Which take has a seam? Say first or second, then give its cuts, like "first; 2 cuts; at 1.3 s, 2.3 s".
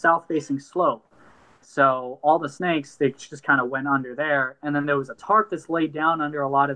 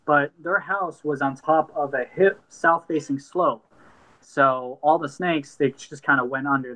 first; 1 cut; at 5.2 s